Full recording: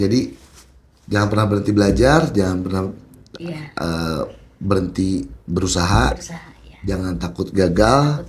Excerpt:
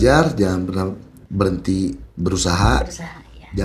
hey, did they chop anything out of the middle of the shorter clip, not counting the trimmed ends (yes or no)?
yes